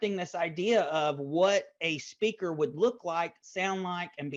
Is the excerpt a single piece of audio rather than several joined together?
yes; 0 cuts

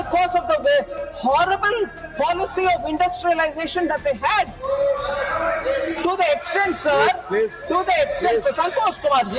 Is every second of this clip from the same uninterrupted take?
yes; 0 cuts

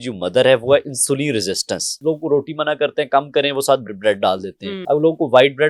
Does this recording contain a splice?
yes; 2 cuts; at 2.0 s, 4.7 s

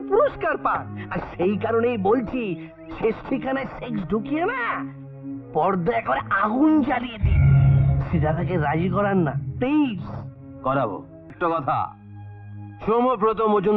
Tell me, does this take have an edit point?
yes; 1 cut; at 11.3 s

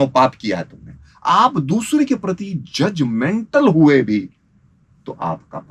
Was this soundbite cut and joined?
yes; 1 cut; at 1.1 s

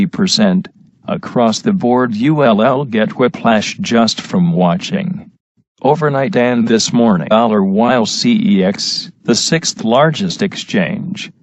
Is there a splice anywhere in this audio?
no; 0 cuts

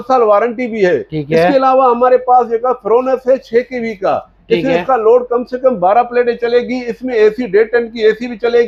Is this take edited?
no; 0 cuts

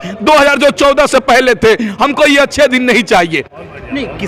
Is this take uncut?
yes; 0 cuts

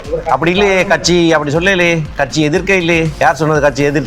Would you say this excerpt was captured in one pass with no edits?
no; 1 cut; at 3.1 s

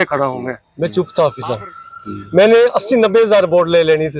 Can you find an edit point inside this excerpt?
yes; 1 cut; at 0.9 s

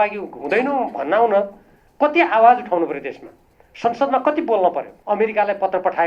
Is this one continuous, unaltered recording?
no; 1 cut; at 4.9 s

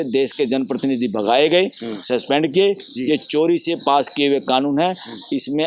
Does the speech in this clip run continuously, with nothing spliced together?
yes; 0 cuts

